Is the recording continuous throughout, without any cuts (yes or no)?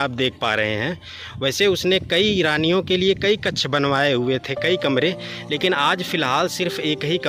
yes